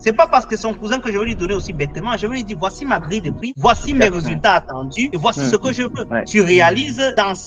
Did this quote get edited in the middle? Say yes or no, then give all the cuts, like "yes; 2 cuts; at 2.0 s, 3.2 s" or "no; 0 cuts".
no; 0 cuts